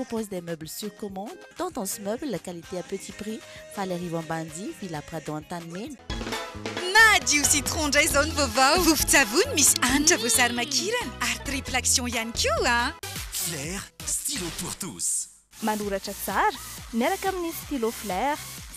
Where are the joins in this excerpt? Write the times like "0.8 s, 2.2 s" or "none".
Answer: 6.0 s